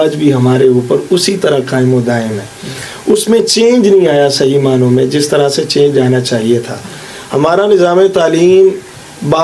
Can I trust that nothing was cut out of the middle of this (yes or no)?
yes